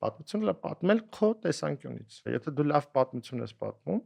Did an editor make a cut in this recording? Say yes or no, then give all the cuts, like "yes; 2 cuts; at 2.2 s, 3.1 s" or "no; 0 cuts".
yes; 1 cut; at 2.3 s